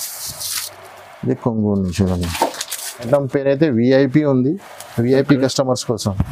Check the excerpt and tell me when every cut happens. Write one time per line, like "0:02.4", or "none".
0:03.1